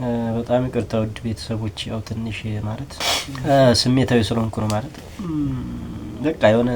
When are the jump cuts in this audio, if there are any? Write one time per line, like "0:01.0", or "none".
0:03.0